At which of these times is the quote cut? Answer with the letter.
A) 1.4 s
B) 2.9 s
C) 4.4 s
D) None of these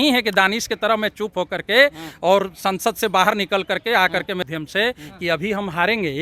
C